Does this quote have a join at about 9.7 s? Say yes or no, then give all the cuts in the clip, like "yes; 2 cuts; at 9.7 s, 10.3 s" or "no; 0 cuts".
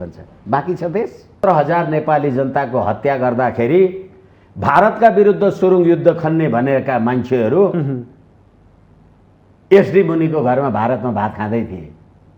no; 1 cut; at 1.4 s